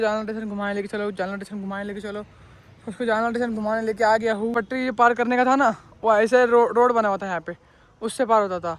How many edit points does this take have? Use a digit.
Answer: 1